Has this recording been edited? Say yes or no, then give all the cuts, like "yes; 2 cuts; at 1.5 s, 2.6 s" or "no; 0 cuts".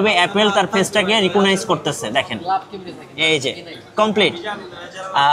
no; 0 cuts